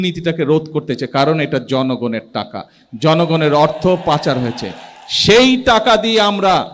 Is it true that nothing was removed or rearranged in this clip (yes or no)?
yes